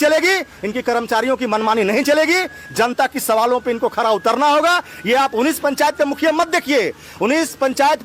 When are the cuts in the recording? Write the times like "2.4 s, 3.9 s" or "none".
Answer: none